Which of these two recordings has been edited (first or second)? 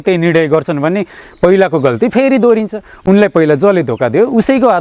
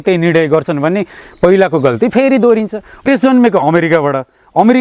second